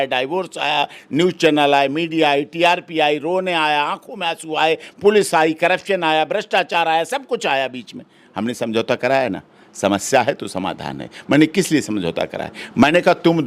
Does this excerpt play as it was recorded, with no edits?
yes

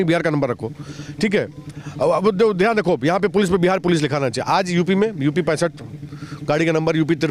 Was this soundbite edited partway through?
no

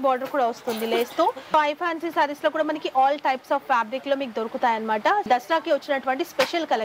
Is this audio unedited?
no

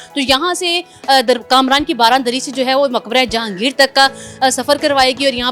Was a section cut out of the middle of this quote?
no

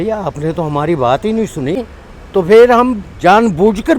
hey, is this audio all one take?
no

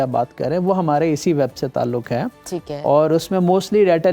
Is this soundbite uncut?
yes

